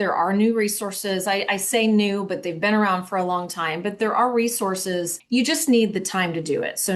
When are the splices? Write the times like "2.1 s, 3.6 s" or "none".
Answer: 5.1 s